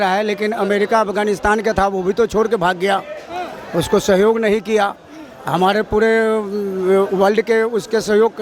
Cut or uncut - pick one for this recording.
uncut